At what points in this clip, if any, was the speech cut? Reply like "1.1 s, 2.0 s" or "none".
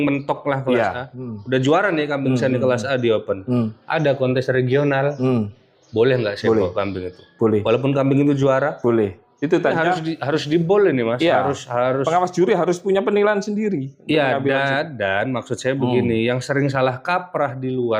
9.7 s